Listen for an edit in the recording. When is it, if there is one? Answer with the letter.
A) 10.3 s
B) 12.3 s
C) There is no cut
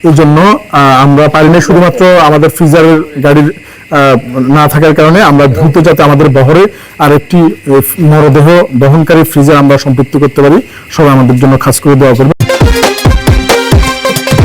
B